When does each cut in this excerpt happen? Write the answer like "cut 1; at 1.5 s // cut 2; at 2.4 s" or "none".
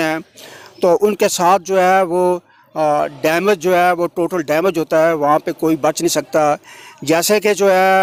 none